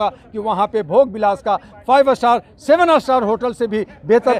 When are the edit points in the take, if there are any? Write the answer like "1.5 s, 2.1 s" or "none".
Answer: none